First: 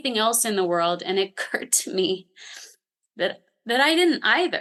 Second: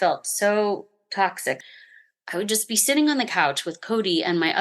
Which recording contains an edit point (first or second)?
second